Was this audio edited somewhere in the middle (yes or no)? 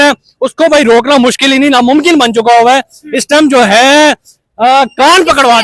no